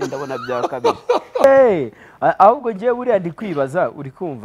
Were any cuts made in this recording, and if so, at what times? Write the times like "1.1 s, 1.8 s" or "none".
1.4 s